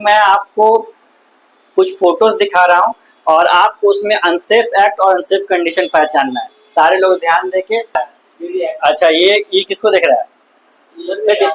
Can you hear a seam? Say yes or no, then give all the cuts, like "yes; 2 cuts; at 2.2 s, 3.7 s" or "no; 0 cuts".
yes; 1 cut; at 7.9 s